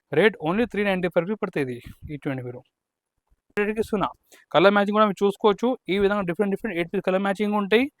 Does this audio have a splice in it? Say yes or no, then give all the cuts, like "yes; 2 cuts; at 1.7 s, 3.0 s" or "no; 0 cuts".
yes; 1 cut; at 3.6 s